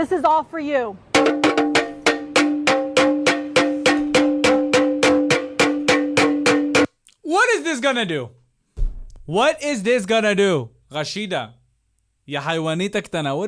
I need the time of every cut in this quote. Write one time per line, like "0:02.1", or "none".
none